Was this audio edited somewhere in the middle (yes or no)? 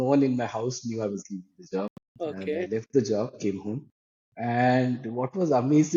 no